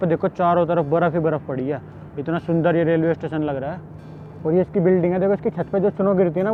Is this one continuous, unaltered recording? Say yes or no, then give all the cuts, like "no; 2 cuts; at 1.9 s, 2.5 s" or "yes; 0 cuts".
yes; 0 cuts